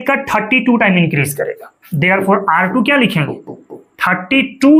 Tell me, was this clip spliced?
no; 0 cuts

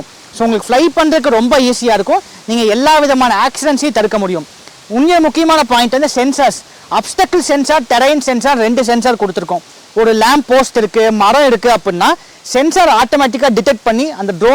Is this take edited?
no; 0 cuts

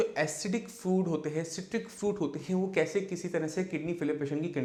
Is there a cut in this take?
no; 0 cuts

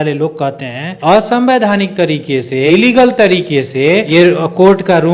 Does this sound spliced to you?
yes; 3 cuts; at 0.9 s, 2.7 s, 4.1 s

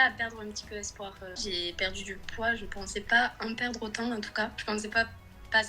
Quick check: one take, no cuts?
no; 1 cut; at 1.4 s

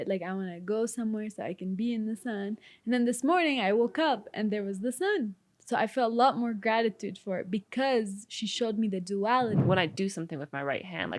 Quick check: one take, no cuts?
no; 1 cut; at 9.6 s

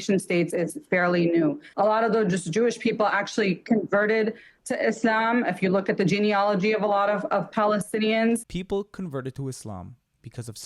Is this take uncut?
no; 2 cuts; at 1.6 s, 8.5 s

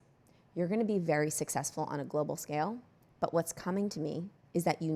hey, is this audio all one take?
yes; 0 cuts

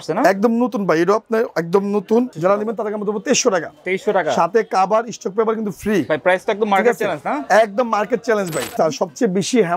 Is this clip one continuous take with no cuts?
no; 2 cuts; at 2.3 s, 8.8 s

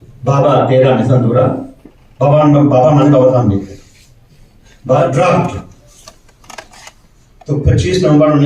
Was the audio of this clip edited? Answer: yes; 1 cut; at 5.0 s

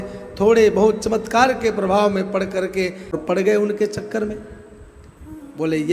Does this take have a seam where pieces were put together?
yes; 1 cut; at 3.2 s

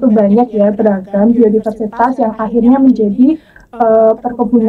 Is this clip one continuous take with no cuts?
yes; 0 cuts

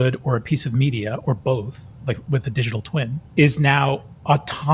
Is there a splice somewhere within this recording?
no; 0 cuts

